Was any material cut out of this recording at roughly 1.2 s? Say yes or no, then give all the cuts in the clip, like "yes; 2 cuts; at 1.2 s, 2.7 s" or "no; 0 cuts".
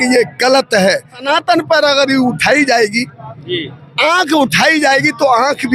yes; 1 cut; at 1.2 s